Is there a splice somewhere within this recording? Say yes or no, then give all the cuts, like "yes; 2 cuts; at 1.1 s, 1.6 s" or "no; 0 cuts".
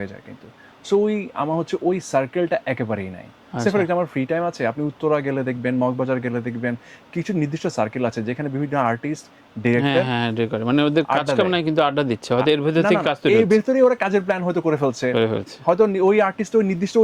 no; 0 cuts